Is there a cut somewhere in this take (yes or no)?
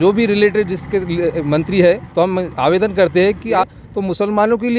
yes